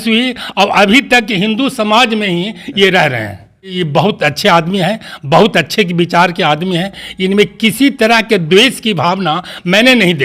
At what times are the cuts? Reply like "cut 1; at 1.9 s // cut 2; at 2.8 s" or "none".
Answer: cut 1; at 3.7 s